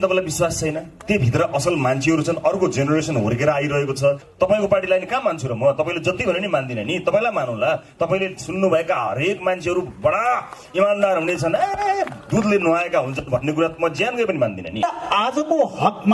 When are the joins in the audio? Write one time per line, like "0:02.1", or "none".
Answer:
0:04.3
0:14.8